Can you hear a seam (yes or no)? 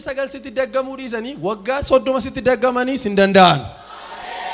no